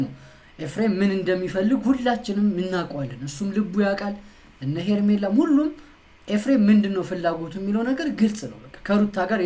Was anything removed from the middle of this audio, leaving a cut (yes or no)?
no